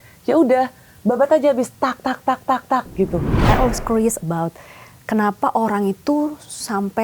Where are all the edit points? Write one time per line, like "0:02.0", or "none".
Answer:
0:03.3